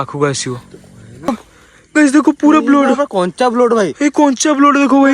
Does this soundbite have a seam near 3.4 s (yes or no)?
no